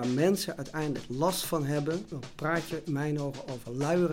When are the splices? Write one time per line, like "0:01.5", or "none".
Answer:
0:02.2